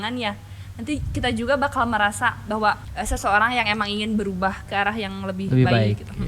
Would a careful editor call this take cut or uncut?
cut